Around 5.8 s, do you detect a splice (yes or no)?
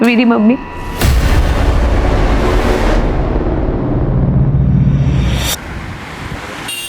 yes